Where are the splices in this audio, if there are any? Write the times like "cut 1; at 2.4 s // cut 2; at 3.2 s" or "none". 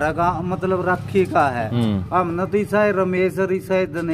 none

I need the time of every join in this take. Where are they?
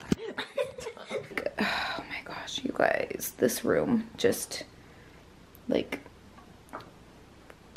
cut 1; at 1.4 s

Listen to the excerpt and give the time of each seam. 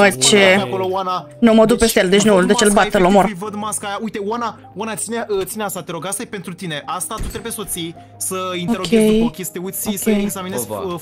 none

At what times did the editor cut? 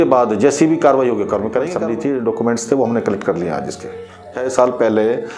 cut 1; at 1.7 s // cut 2; at 4.4 s

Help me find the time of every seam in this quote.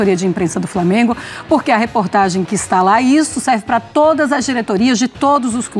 none

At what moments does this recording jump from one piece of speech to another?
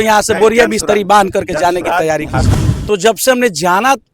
cut 1; at 2.5 s

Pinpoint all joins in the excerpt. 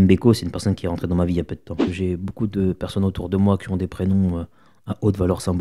cut 1; at 1.8 s

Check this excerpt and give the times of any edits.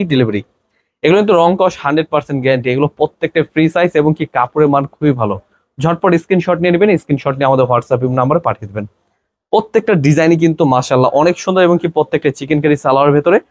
none

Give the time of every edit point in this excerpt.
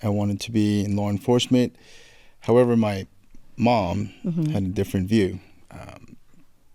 none

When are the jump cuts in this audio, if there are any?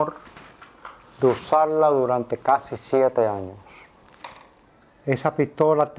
cut 1; at 4.7 s

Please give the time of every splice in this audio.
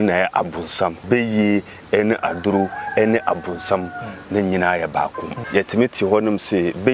cut 1; at 1.0 s // cut 2; at 5.4 s

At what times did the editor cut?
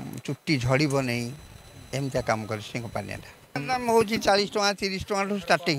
cut 1; at 3.6 s

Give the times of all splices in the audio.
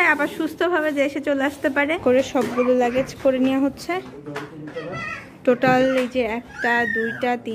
cut 1; at 2.2 s

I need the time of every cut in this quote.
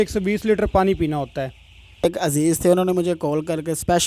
cut 1; at 2.0 s

